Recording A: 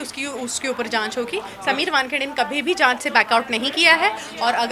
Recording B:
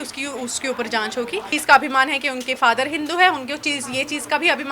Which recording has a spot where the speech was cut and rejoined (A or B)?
B